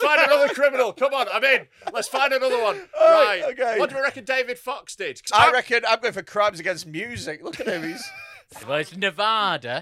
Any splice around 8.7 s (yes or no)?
yes